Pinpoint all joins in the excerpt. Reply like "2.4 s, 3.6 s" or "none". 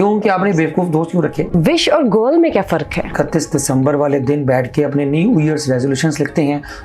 1.5 s, 3.1 s